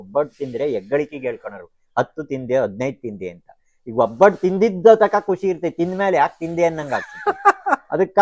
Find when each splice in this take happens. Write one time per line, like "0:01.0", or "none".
none